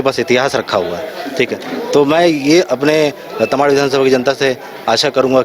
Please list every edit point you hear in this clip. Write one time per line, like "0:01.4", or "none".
none